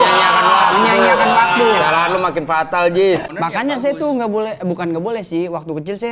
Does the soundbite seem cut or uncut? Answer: cut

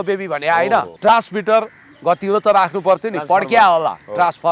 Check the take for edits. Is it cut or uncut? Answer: cut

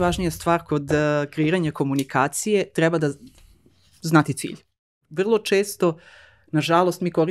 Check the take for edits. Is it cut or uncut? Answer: cut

